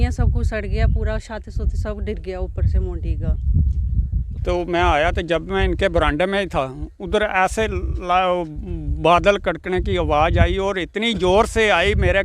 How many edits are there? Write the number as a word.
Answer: one